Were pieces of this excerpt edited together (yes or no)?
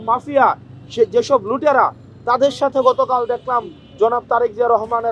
no